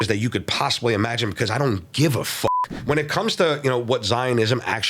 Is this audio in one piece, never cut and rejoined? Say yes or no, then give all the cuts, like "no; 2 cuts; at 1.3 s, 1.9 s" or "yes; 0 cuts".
no; 1 cut; at 2.7 s